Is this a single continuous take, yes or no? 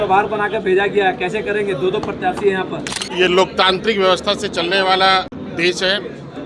no